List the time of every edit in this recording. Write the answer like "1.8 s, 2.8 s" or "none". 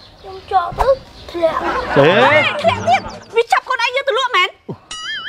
1.2 s, 3.2 s